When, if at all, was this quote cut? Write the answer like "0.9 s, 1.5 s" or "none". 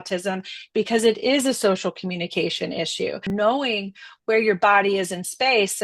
3.3 s